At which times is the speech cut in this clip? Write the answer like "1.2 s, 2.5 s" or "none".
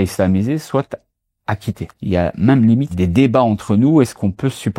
1.9 s, 2.9 s